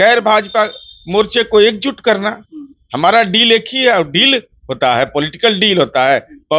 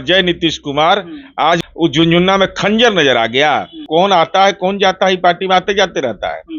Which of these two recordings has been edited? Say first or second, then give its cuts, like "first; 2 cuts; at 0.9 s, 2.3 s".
second; 2 cuts; at 1.4 s, 3.8 s